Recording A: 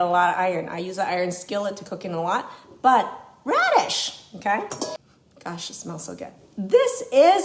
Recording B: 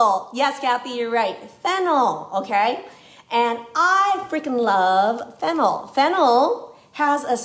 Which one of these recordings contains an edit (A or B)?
A